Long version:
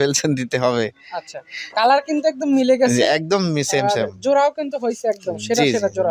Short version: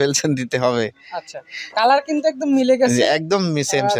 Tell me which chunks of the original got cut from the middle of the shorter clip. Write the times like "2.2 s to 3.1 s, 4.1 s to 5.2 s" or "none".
none